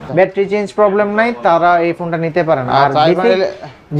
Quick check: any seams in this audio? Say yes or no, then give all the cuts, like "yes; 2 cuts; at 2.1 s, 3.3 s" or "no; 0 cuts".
no; 0 cuts